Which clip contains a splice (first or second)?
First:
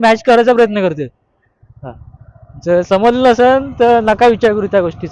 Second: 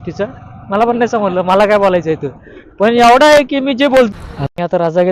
second